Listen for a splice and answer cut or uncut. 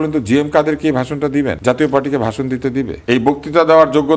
cut